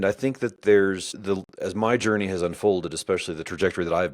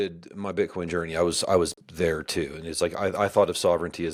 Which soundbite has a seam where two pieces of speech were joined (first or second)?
first